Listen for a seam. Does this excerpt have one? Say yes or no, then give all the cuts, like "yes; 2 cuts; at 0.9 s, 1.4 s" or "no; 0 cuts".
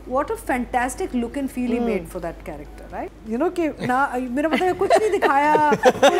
yes; 1 cut; at 3.2 s